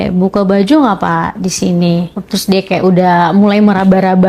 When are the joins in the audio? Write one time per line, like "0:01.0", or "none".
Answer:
0:02.3

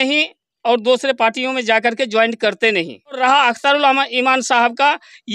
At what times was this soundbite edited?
0:03.2

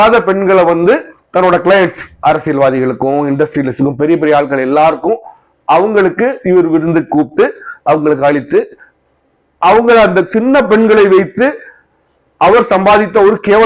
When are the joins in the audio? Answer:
none

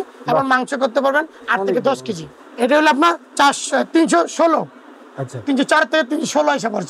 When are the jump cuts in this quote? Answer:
0:02.3

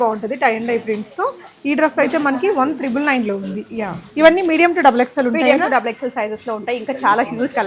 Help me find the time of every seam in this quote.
none

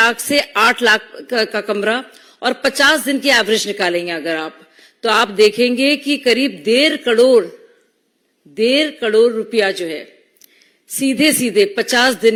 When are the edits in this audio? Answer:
none

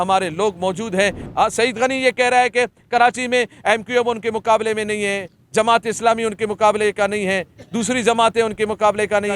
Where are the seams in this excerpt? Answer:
0:01.2

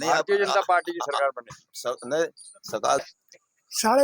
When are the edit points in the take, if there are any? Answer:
0:03.0

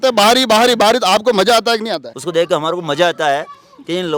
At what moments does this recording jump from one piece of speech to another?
0:02.1

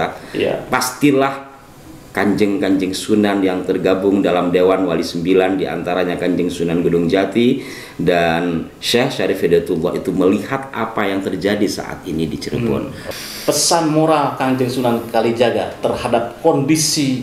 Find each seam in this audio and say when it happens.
0:13.0

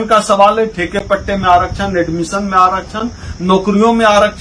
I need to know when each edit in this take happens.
none

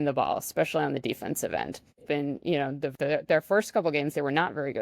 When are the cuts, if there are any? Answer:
0:02.0
0:02.9

